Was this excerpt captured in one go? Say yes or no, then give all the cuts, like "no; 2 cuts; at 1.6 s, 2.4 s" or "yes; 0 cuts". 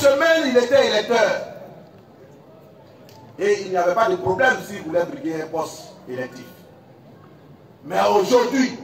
yes; 0 cuts